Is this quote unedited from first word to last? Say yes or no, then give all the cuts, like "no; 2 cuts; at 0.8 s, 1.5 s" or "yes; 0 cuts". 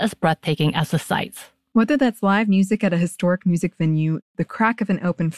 yes; 0 cuts